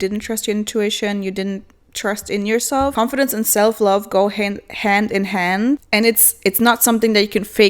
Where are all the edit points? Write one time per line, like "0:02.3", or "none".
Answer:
0:02.9
0:05.8